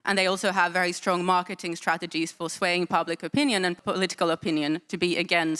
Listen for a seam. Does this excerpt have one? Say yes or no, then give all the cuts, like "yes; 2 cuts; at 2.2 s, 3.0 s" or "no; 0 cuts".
no; 0 cuts